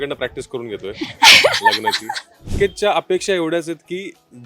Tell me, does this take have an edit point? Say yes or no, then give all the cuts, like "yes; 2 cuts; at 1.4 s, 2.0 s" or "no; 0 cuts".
yes; 1 cut; at 2.5 s